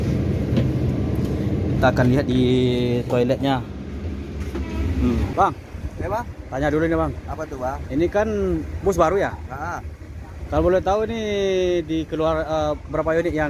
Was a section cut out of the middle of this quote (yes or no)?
yes